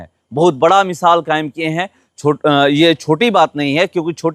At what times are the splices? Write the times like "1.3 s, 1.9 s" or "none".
none